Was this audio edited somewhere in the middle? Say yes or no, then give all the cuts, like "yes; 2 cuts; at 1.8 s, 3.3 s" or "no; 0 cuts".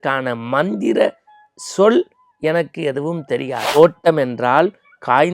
yes; 1 cut; at 3.7 s